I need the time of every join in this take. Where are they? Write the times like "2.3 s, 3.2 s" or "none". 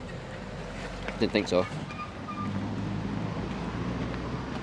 none